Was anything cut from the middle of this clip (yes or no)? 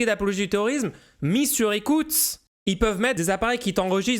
yes